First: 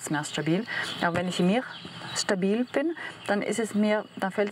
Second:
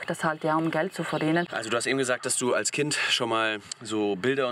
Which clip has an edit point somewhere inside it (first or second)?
second